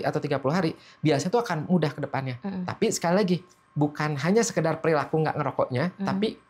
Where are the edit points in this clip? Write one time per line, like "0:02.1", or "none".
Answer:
none